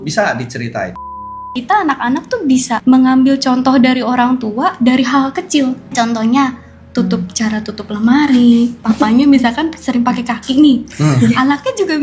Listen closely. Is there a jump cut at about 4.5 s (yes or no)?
no